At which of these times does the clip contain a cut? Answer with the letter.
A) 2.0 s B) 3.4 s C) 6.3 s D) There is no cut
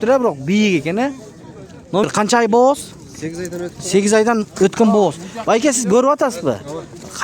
A